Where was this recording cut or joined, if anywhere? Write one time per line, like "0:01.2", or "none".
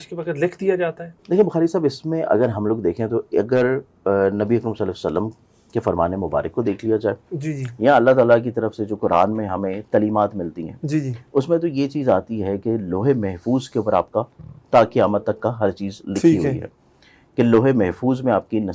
none